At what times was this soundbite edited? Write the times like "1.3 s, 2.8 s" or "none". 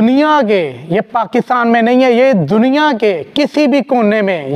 none